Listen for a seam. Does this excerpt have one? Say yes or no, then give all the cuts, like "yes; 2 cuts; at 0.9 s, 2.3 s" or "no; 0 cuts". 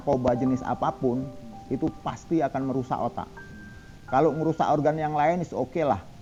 no; 0 cuts